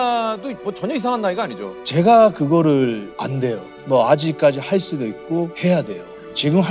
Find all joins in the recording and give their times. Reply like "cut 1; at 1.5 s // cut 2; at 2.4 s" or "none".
none